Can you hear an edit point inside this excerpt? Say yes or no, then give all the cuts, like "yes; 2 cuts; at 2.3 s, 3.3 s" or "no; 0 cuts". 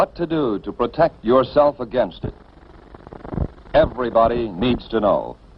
yes; 1 cut; at 2.2 s